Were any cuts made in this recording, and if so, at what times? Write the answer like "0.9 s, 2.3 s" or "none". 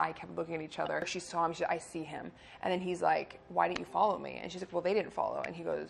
1.1 s

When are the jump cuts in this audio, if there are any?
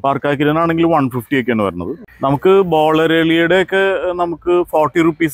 2.1 s

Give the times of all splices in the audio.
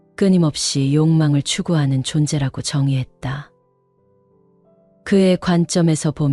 3.5 s, 5.0 s

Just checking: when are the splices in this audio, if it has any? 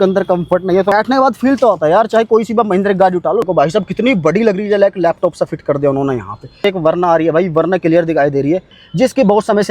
0.9 s, 3.4 s, 6.5 s, 8.8 s

